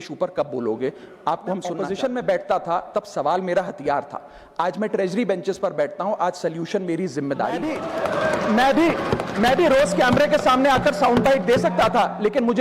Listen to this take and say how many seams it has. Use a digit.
2